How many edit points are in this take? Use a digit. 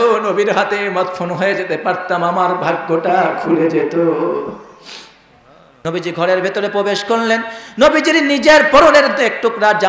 1